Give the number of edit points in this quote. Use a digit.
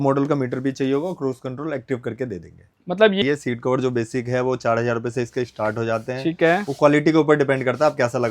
1